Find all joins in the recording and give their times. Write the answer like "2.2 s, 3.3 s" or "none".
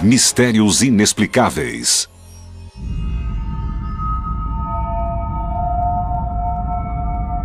6.4 s